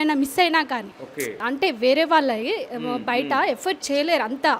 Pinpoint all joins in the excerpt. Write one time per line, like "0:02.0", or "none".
0:01.3